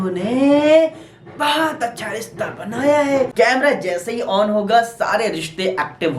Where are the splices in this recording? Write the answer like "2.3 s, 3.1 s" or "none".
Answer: 3.3 s